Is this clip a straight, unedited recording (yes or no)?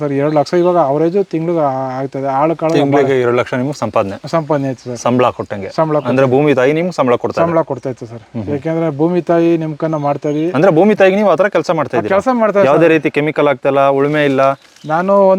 yes